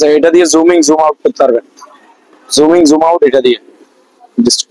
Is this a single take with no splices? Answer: yes; 0 cuts

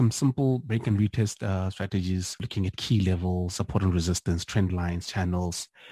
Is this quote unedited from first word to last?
no; 1 cut; at 2.5 s

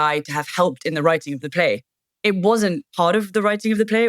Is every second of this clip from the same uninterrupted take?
no; 1 cut; at 2.8 s

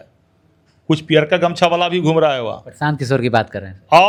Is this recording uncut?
yes; 0 cuts

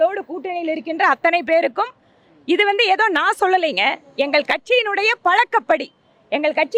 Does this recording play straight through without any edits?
yes; 0 cuts

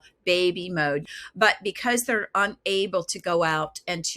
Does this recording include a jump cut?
yes; 1 cut; at 1.1 s

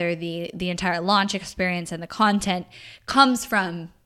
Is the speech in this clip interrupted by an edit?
no; 0 cuts

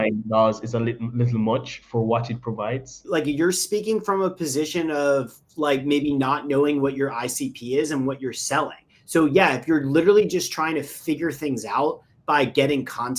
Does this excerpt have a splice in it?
yes; 1 cut; at 3.0 s

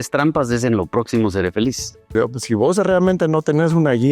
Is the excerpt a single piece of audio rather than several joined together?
no; 1 cut; at 2.1 s

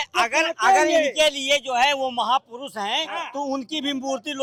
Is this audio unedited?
yes; 0 cuts

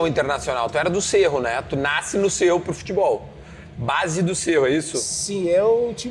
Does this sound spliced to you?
no; 0 cuts

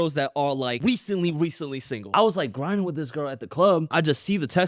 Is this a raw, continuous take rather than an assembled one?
no; 3 cuts; at 0.8 s, 2.1 s, 3.9 s

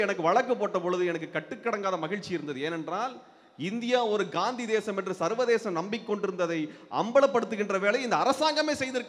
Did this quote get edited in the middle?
no; 0 cuts

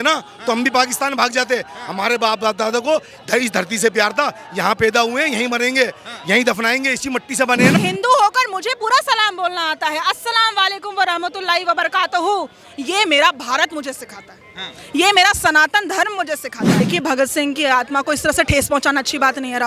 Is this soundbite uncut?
no; 2 cuts; at 7.8 s, 16.8 s

